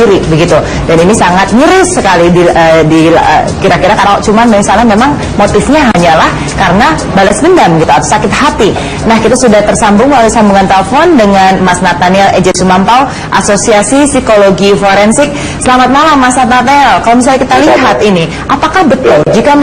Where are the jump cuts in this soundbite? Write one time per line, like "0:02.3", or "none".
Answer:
0:14.8

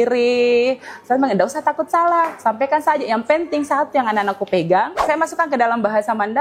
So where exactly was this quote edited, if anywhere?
0:05.0

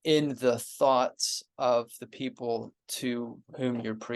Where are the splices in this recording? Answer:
0:02.8

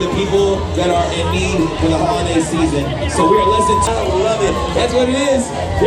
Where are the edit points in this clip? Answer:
0:03.8

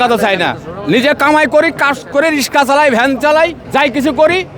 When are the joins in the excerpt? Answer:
0:03.6

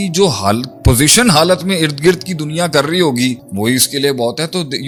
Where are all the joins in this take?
none

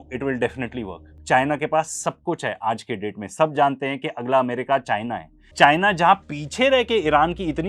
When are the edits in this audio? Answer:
0:01.2
0:05.4

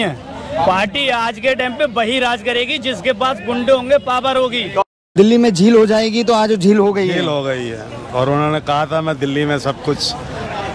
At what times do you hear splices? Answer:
0:04.8

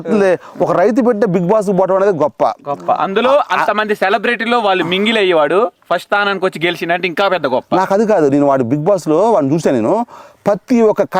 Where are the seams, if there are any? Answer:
none

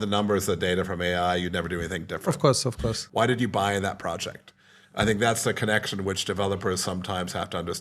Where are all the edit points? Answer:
0:03.0

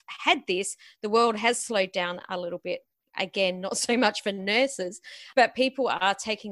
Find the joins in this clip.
0:05.2

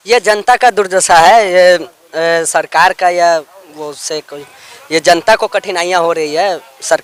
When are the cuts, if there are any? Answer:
none

